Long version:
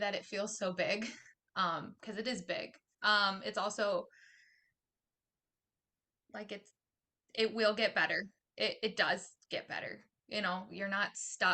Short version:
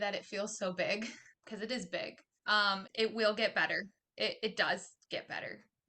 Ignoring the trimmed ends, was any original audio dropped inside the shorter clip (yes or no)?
yes